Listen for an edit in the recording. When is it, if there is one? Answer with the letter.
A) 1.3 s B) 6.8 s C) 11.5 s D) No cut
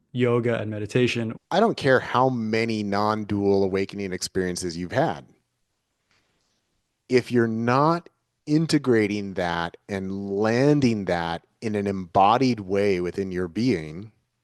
A